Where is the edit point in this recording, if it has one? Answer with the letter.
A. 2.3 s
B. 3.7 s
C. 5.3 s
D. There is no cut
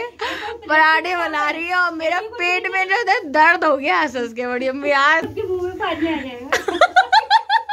C